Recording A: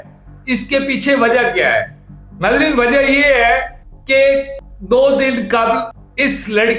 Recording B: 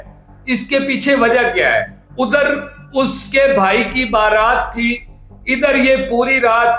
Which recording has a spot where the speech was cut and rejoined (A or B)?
B